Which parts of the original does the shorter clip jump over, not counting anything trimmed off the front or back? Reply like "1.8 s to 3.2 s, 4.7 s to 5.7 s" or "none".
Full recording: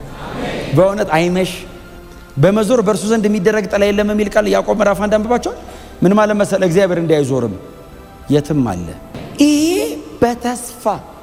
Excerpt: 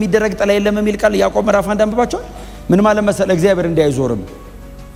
none